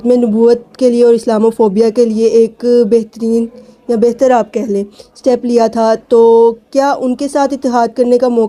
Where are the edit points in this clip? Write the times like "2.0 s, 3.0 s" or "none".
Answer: none